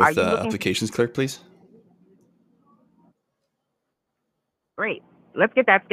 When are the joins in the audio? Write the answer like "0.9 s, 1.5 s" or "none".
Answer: none